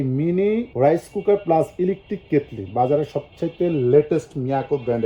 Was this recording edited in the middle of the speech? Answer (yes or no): no